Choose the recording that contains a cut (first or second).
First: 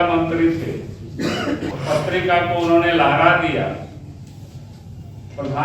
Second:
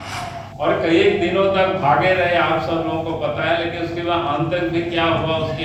first